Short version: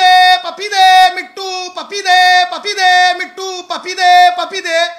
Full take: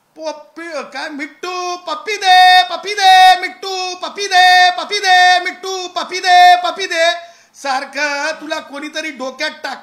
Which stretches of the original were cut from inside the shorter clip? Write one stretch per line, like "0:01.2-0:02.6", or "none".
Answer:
none